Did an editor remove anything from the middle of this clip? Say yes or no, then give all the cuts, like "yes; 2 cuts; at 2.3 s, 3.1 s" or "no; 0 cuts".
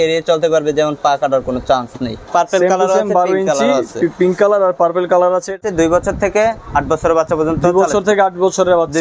yes; 2 cuts; at 2.2 s, 5.6 s